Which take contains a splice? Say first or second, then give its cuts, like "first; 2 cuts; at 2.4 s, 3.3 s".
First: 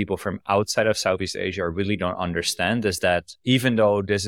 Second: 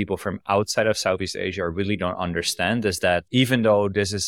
second; 1 cut; at 3.3 s